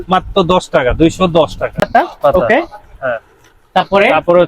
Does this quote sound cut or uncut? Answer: cut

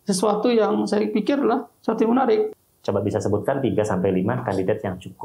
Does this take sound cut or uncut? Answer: cut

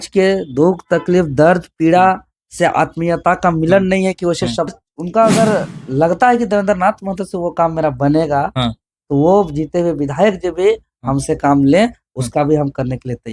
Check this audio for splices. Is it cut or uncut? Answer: cut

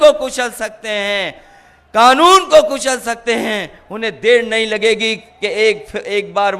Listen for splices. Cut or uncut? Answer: uncut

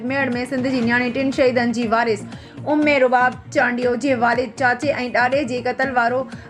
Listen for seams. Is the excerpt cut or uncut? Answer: uncut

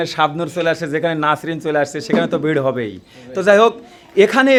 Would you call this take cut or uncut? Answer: uncut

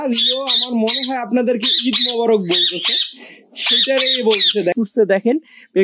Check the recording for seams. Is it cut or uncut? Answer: cut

